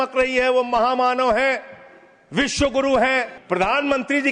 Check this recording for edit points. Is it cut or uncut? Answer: cut